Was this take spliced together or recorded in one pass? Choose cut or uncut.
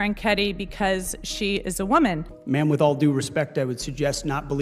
cut